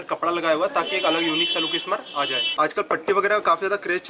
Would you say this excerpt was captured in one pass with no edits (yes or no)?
no